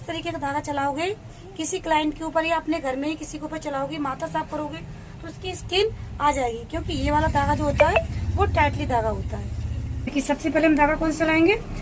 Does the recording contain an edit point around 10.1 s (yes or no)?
yes